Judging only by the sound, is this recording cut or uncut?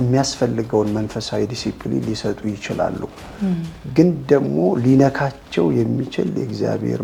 uncut